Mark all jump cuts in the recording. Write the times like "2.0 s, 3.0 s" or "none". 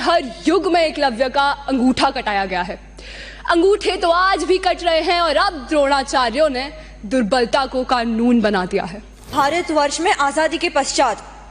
9.3 s